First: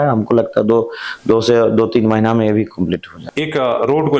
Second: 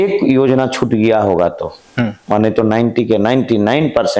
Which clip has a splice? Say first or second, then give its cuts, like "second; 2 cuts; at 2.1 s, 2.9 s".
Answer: first; 1 cut; at 3.2 s